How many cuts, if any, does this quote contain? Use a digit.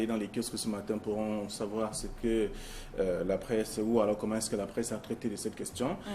1